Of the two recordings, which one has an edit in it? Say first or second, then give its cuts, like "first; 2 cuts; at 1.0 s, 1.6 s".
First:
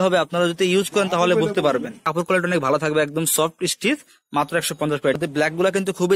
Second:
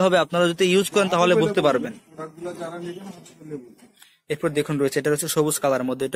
first; 2 cuts; at 2.1 s, 5.2 s